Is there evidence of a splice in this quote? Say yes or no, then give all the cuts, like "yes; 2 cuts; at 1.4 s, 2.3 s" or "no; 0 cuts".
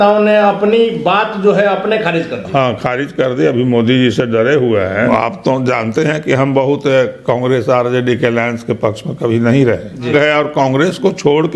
yes; 2 cuts; at 5.1 s, 10.1 s